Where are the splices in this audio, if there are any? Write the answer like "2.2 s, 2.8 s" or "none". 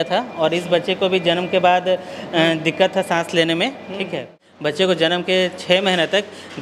4.5 s